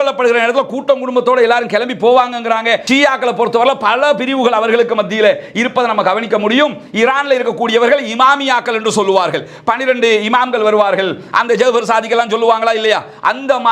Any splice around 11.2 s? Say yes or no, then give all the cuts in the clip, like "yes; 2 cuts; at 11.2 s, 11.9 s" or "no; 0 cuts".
no; 1 cut; at 2.8 s